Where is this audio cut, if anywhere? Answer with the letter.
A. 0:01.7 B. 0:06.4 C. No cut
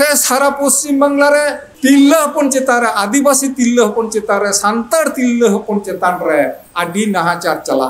A